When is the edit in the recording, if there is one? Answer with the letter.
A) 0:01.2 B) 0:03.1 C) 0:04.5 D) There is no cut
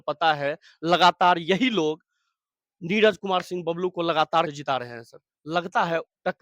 C